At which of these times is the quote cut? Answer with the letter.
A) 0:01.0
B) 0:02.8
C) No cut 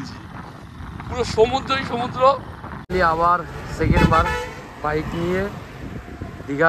B